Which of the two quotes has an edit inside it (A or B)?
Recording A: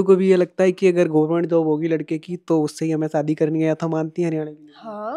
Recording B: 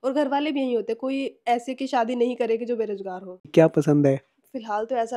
B